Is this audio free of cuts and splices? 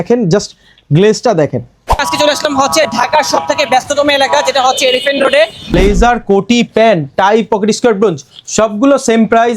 no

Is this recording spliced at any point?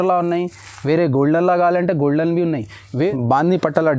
yes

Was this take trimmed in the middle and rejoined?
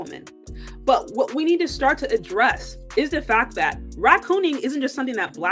no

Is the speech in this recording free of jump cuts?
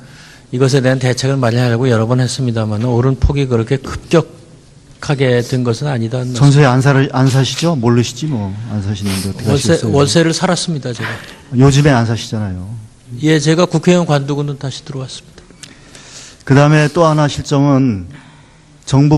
no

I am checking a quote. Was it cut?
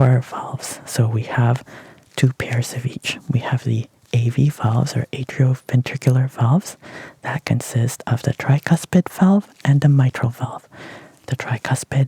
no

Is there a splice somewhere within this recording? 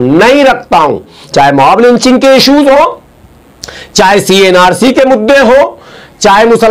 yes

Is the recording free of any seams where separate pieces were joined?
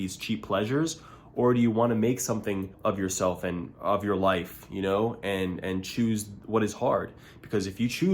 no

